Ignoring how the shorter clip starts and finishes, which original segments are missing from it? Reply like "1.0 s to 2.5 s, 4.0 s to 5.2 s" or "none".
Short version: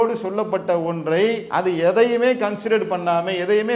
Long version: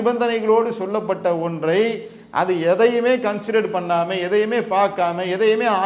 2.0 s to 2.3 s